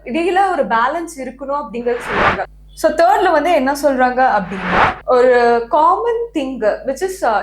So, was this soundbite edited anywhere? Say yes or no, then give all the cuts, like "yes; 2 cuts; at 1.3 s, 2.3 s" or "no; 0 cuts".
yes; 2 cuts; at 2.6 s, 5.0 s